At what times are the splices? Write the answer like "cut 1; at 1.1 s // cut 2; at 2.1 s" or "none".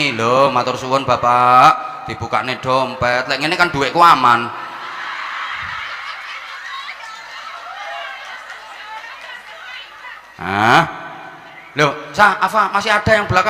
none